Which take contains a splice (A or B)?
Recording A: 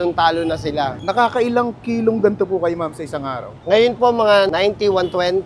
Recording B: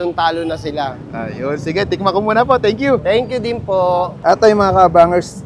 A